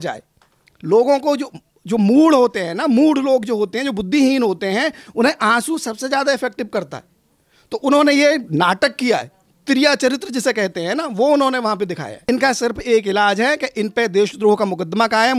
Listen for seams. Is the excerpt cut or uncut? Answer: cut